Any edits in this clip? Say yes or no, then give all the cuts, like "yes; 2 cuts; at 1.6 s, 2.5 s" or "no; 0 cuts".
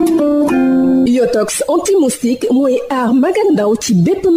yes; 1 cut; at 1.0 s